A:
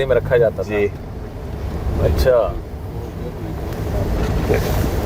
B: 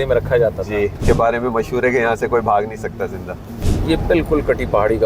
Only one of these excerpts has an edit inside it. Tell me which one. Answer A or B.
B